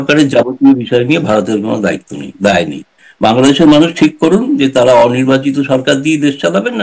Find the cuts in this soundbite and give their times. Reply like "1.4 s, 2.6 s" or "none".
none